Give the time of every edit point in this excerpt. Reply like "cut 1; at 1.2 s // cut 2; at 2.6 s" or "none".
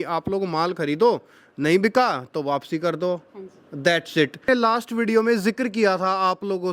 cut 1; at 4.5 s